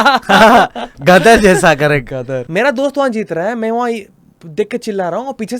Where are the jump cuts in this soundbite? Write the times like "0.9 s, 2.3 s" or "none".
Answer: 2.5 s